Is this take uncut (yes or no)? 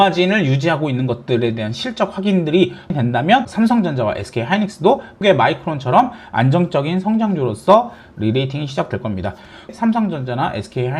no